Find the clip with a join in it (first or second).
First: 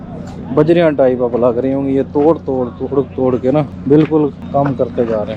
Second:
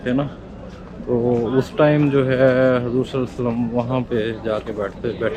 first